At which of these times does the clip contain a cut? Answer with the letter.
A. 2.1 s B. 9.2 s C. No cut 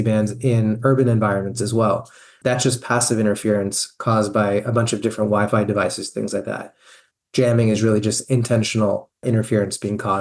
B